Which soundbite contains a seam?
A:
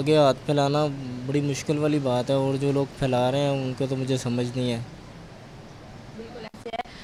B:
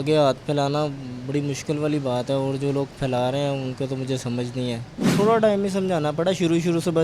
B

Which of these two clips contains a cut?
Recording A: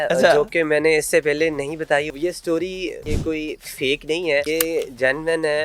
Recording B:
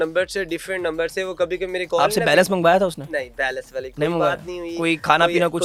A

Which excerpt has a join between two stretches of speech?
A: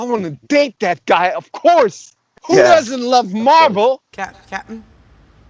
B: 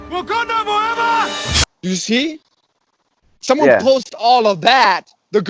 A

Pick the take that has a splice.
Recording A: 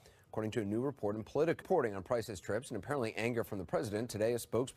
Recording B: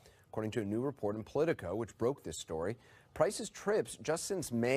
B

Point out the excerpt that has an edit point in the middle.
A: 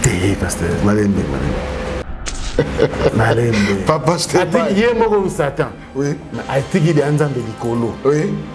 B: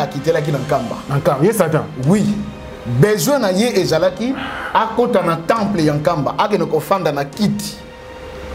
A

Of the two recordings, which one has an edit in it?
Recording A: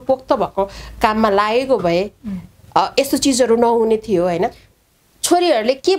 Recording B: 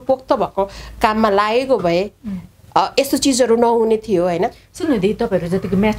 A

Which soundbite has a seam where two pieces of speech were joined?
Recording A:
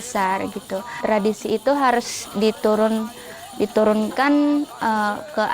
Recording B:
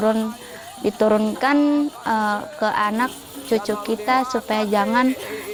A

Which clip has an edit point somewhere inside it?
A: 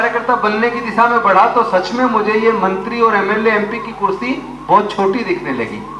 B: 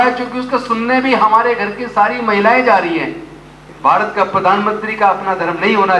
B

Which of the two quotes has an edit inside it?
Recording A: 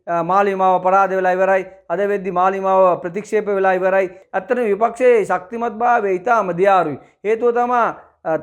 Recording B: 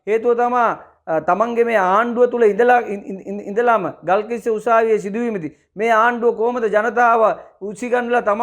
A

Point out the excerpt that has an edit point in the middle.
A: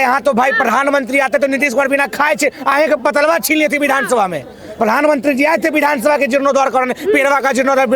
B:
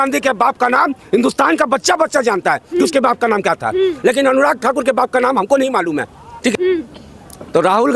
B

